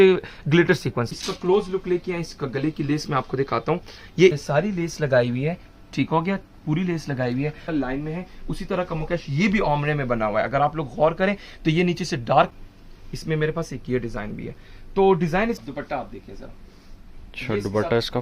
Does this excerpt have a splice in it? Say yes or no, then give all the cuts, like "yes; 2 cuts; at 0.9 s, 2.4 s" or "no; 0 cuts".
yes; 5 cuts; at 1.1 s, 4.4 s, 7.6 s, 12.5 s, 15.6 s